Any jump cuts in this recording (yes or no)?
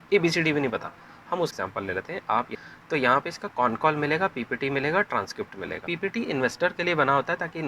yes